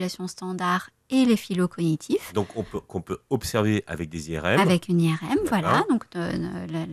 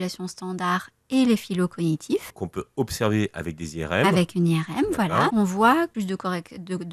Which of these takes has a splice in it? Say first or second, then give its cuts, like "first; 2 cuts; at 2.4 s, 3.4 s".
second; 3 cuts; at 2.3 s, 5.3 s, 5.9 s